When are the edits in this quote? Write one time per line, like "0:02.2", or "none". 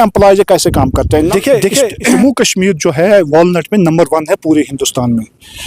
0:01.1
0:02.2